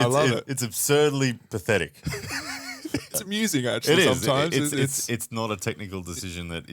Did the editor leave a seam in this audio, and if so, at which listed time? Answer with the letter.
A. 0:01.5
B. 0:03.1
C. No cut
B